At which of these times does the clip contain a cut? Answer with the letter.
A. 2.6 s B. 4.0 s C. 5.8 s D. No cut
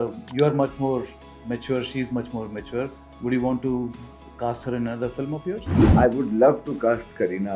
C